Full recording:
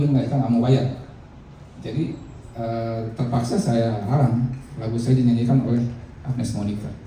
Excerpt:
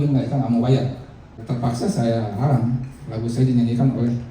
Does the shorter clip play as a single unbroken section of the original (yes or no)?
no